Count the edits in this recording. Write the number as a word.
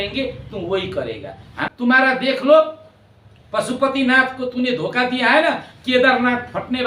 one